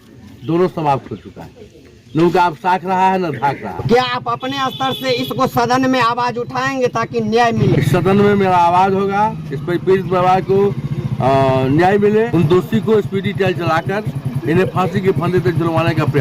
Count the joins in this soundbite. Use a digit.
3